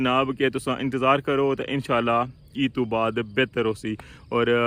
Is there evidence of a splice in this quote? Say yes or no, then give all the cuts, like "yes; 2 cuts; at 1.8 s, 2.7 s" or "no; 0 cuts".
no; 0 cuts